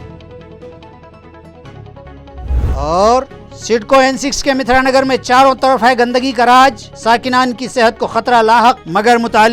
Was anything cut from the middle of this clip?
yes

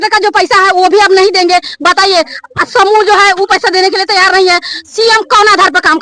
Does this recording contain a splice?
no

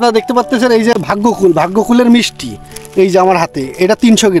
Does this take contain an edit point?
yes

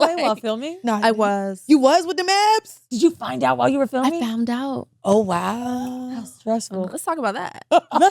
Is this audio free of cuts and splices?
no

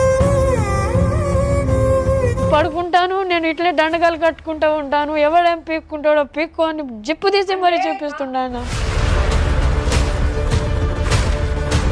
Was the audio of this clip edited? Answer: yes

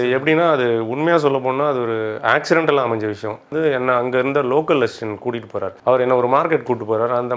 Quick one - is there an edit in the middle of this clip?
yes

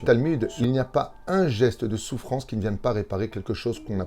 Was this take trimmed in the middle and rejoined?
no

